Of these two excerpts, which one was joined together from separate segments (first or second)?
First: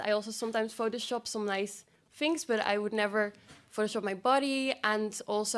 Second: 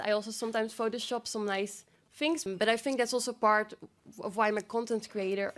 second